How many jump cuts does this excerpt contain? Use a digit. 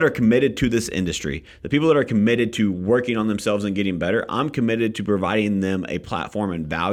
0